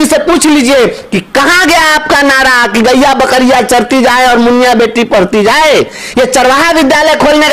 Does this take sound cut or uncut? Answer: uncut